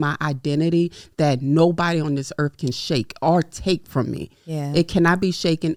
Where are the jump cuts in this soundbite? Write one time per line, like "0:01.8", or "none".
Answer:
none